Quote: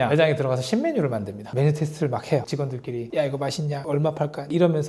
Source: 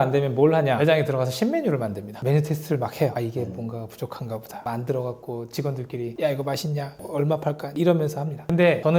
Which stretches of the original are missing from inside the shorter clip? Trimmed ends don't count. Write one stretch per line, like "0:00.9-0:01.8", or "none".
0:03.1-0:05.5
0:06.9-0:07.1